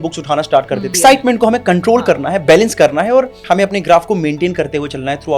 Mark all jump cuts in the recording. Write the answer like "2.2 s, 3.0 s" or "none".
0.9 s, 3.4 s